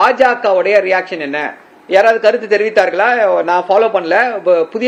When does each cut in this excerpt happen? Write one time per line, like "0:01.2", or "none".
none